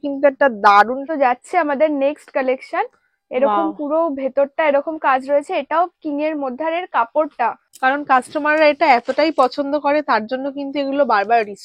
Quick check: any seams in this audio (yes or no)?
yes